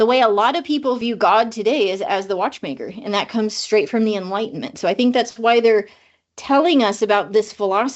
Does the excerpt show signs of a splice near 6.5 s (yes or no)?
no